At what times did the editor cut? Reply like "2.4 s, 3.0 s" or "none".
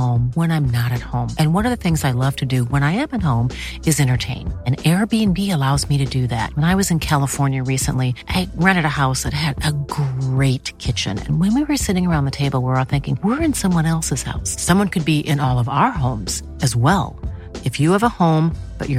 none